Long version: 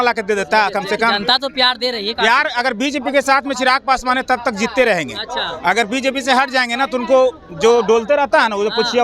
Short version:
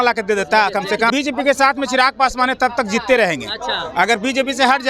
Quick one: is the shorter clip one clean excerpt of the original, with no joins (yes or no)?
no